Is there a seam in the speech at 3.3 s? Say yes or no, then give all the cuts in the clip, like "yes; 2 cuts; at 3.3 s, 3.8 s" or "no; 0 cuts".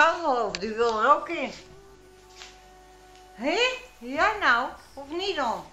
no; 0 cuts